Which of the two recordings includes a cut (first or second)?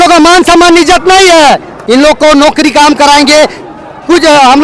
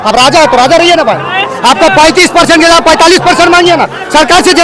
first